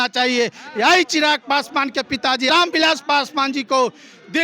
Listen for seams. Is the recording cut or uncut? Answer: cut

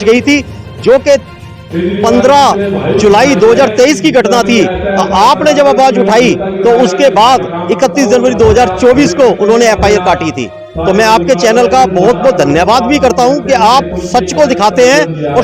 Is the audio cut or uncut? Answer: uncut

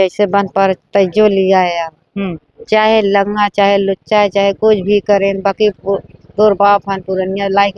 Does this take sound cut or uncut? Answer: uncut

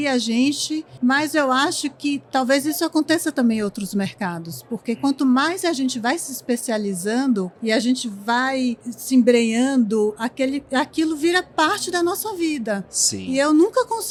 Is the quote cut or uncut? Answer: uncut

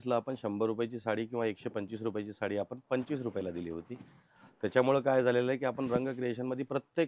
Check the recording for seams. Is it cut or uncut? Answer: uncut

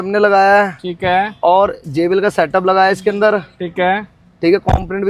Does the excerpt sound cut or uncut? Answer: uncut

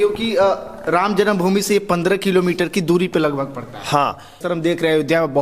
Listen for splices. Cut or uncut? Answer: cut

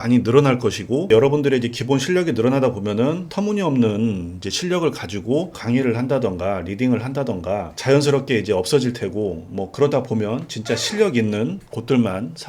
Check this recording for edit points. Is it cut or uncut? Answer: uncut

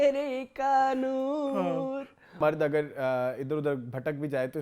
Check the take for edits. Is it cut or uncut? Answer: cut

